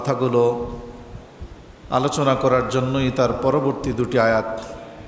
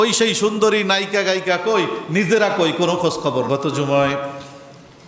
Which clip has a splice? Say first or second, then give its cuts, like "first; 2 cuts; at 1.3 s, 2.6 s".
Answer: second; 1 cut; at 3.5 s